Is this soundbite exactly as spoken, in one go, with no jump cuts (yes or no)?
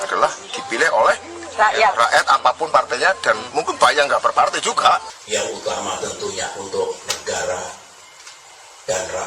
no